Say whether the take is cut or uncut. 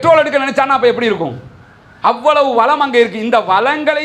uncut